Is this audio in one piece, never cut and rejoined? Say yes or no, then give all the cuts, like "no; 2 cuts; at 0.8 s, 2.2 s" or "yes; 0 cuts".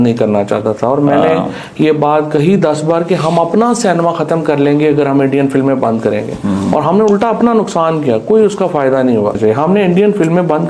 no; 1 cut; at 9.4 s